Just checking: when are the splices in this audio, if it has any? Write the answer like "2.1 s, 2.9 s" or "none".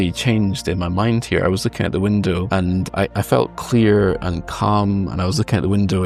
none